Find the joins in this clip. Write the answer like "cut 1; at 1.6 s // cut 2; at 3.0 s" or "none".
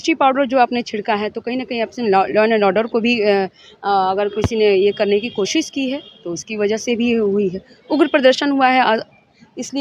none